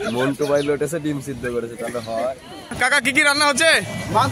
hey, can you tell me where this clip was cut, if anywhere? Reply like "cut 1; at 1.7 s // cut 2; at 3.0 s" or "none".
cut 1; at 2.8 s

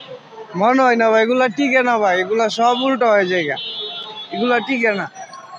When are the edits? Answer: none

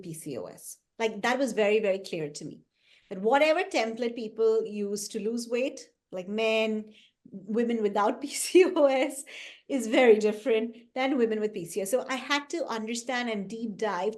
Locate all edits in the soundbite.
none

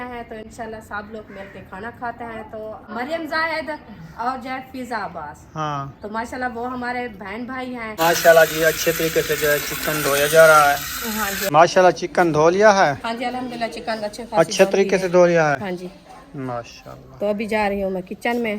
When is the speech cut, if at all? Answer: cut 1; at 2.7 s // cut 2; at 7.9 s // cut 3; at 11.4 s

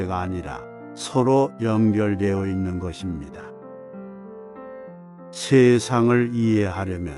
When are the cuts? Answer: cut 1; at 3.2 s // cut 2; at 4.9 s

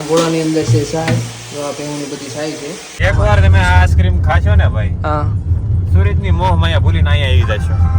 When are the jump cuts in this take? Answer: cut 1; at 2.9 s

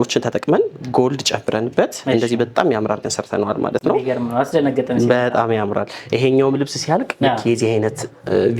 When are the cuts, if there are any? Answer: none

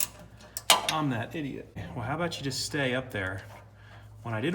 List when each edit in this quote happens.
cut 1; at 1.8 s

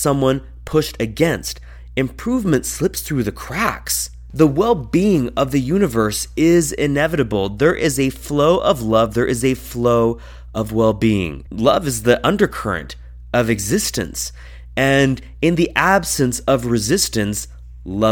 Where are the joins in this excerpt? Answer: cut 1; at 4.2 s

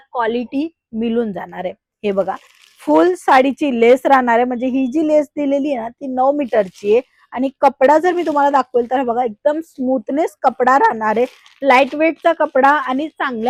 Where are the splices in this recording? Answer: none

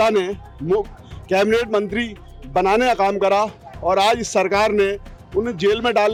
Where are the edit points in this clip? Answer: none

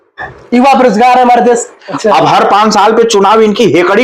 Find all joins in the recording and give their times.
cut 1; at 1.8 s

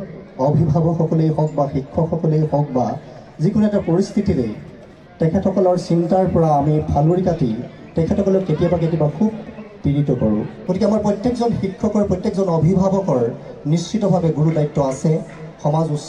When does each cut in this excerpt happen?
cut 1; at 10.5 s

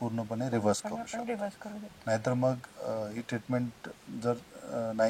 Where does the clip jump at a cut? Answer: none

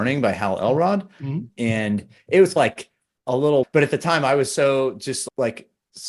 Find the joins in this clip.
none

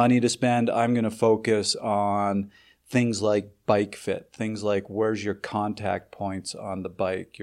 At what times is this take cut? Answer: none

